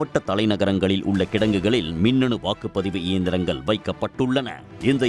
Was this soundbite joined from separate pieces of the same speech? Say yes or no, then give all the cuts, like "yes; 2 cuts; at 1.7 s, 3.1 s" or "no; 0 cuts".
no; 0 cuts